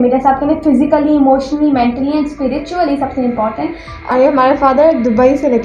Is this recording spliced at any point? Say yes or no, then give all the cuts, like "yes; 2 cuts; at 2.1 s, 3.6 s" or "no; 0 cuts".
yes; 1 cut; at 3.9 s